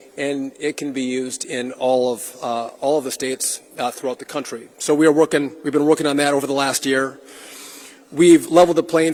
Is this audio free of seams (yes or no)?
yes